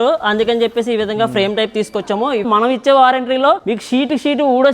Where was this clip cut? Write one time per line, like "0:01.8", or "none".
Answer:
0:02.4
0:03.7